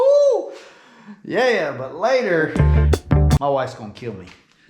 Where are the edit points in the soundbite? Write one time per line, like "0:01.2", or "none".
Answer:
0:03.4

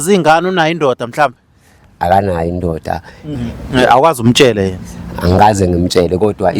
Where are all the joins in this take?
0:03.3

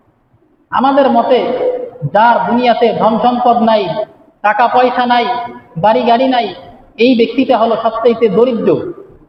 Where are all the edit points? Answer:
none

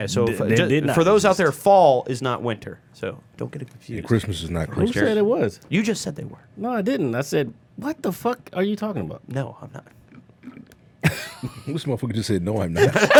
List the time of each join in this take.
none

